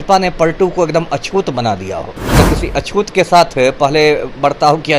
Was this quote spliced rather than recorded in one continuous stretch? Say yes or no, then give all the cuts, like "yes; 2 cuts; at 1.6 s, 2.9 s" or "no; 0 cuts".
yes; 1 cut; at 2.3 s